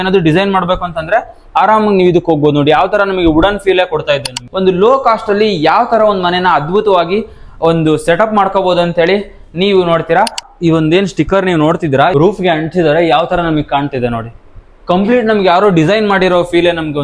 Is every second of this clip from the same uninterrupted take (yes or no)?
no